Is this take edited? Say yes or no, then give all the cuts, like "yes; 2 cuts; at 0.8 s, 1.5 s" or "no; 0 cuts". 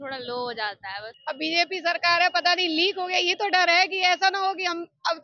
yes; 1 cut; at 1.1 s